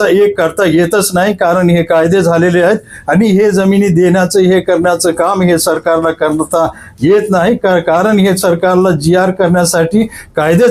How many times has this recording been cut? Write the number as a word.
zero